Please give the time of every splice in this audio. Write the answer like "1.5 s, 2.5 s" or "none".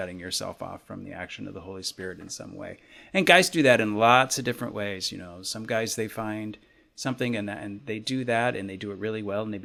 none